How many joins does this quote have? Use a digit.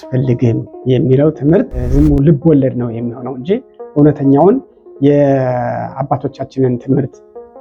1